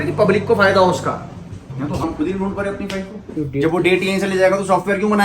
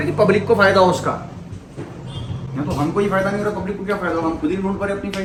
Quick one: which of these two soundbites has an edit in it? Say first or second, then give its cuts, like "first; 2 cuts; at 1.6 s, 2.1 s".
first; 2 cuts; at 2.0 s, 3.3 s